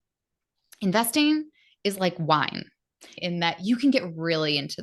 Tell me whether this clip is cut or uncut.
cut